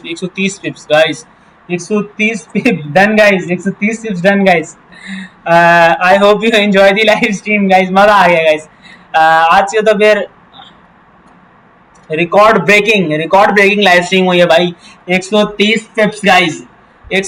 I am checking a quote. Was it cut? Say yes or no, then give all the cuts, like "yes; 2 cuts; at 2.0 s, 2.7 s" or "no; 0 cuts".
no; 0 cuts